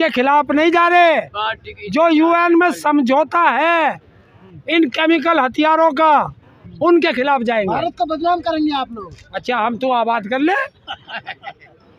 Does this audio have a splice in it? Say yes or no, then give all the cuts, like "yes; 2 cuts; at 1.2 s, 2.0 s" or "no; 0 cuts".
no; 0 cuts